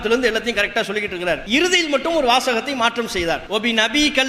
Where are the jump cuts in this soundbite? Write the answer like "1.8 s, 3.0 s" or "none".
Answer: 1.4 s

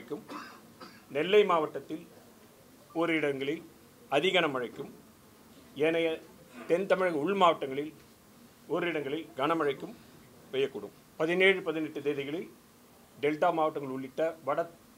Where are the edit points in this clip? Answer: 11.0 s

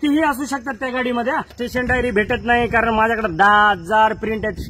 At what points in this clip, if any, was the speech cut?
1.6 s

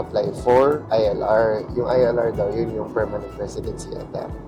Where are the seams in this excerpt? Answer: none

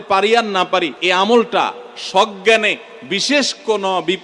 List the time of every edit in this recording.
1.0 s

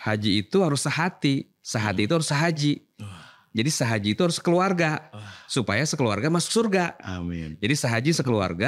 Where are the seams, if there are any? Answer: none

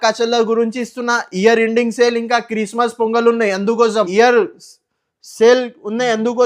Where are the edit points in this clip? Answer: 4.1 s

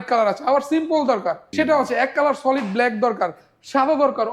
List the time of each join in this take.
1.4 s

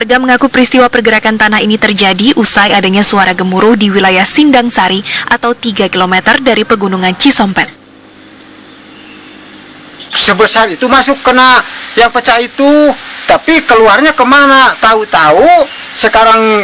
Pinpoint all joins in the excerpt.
2.7 s

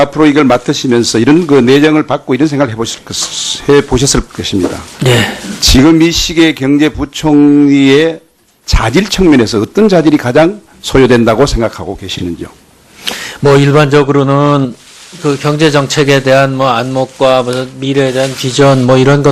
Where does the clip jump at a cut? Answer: 7.0 s

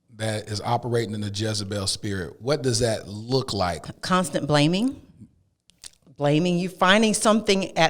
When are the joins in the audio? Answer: 3.9 s

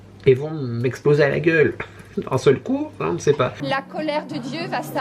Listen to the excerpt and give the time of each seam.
3.6 s

